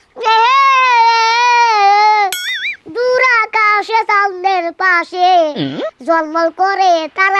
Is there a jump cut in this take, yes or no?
no